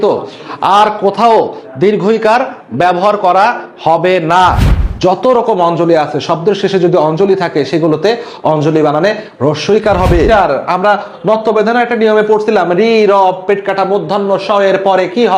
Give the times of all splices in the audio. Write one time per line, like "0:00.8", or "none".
0:04.7
0:10.3